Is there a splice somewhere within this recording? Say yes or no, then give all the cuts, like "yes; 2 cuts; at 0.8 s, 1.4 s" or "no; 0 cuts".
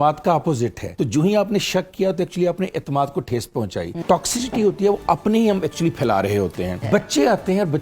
yes; 3 cuts; at 0.9 s, 4.0 s, 6.8 s